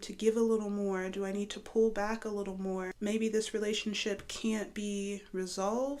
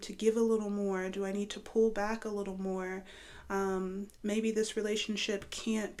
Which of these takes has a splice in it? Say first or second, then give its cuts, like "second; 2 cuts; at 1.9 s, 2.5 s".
first; 1 cut; at 2.9 s